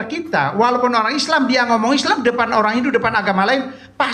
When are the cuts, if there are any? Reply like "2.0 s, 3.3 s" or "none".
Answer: none